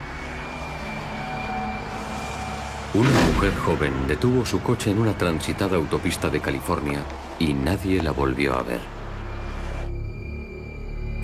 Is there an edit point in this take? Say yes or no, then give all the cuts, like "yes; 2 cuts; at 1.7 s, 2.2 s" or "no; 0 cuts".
yes; 1 cut; at 1.5 s